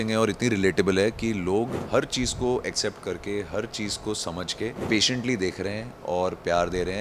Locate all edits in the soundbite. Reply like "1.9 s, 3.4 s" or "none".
1.8 s, 4.8 s

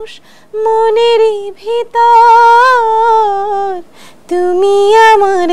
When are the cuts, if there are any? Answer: none

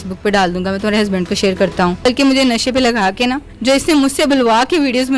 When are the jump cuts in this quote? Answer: 2.0 s, 3.5 s

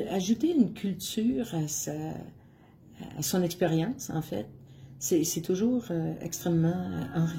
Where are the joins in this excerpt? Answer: none

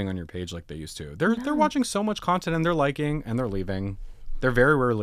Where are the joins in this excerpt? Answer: none

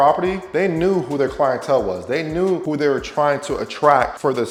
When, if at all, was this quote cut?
none

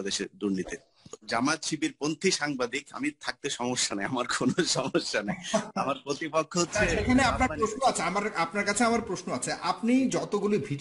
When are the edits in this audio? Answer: 1.2 s

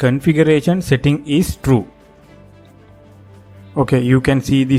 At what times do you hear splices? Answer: none

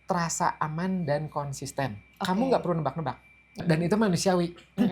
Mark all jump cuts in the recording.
3.6 s

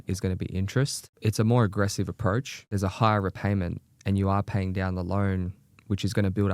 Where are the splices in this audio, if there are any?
1.0 s, 2.6 s

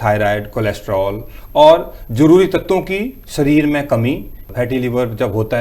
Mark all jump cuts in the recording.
4.4 s

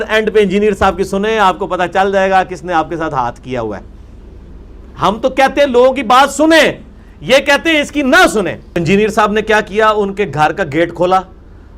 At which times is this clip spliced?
8.8 s

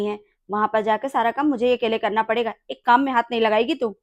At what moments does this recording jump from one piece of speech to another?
none

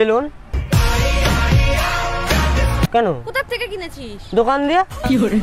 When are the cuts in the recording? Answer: 2.9 s

